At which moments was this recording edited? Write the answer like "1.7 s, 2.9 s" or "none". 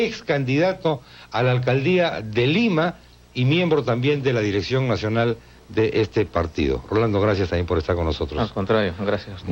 4.8 s